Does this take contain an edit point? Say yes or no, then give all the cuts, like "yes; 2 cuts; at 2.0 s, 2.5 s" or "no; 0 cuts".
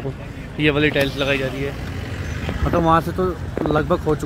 no; 0 cuts